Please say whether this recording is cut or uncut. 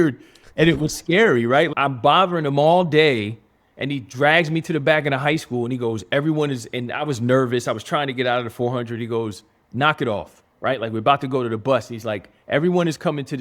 cut